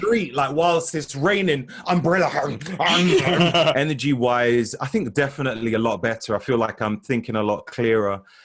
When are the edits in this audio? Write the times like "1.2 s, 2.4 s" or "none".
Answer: 3.7 s